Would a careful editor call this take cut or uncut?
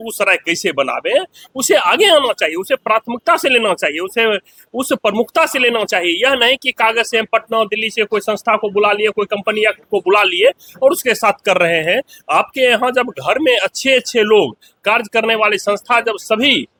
uncut